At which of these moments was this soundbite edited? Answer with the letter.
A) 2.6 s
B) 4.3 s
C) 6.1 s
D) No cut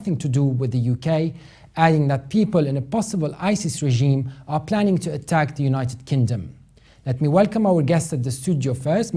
D